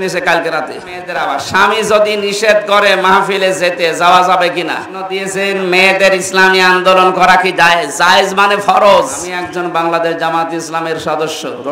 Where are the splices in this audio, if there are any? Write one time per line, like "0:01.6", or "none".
0:01.1
0:05.2
0:09.3